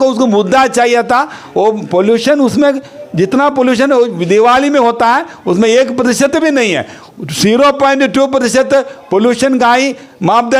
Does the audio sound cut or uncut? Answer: uncut